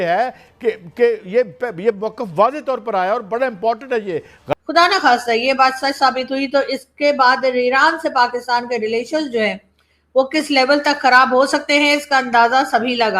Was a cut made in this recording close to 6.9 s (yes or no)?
no